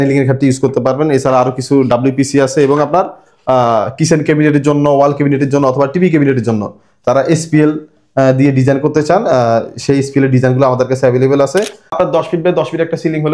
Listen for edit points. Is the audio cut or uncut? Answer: cut